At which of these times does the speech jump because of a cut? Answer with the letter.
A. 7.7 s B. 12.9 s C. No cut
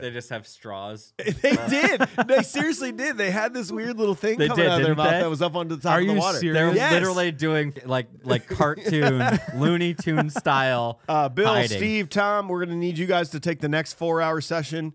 A